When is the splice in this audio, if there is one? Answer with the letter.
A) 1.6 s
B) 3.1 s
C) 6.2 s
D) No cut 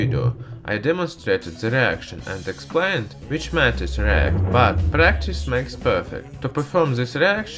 C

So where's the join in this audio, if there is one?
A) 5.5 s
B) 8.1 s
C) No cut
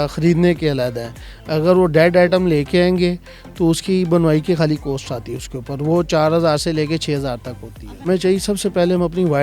B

